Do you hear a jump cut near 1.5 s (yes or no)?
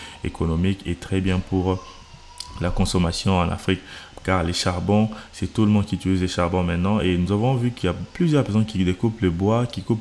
no